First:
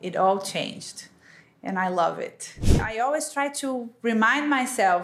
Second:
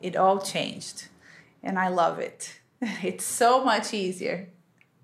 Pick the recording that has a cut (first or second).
first